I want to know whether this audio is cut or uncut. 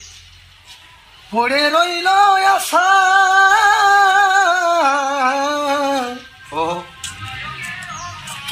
uncut